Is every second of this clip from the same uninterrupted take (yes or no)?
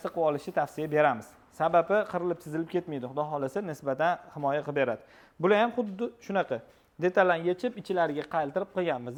yes